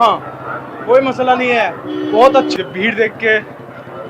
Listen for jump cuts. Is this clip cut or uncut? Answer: cut